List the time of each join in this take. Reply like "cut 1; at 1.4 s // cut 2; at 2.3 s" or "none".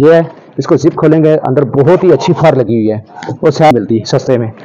cut 1; at 3.7 s